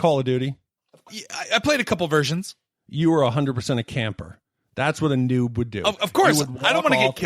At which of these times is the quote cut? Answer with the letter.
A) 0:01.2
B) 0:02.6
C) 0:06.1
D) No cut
A